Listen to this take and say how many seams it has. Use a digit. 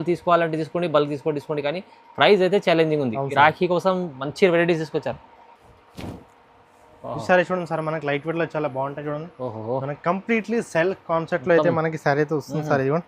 0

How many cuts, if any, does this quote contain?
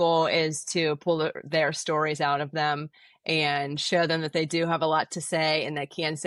0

